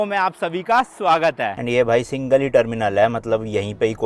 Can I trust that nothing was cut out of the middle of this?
no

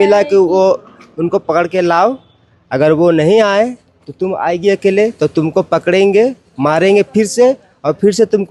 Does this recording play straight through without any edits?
yes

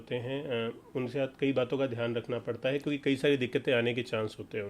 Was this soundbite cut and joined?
no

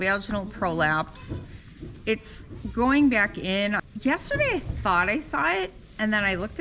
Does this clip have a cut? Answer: no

